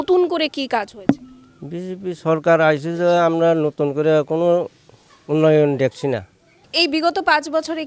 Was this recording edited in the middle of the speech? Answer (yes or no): yes